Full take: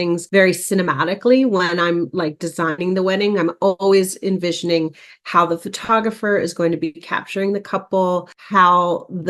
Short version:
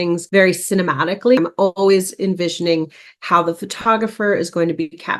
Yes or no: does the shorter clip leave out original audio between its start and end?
yes